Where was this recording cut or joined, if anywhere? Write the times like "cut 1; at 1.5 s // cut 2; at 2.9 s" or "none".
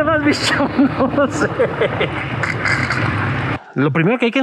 cut 1; at 3.5 s